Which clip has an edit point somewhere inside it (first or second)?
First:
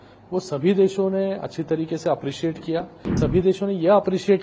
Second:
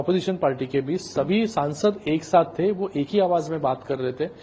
first